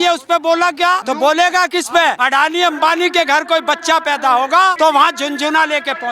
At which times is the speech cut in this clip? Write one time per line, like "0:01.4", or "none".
0:01.0
0:02.2
0:04.7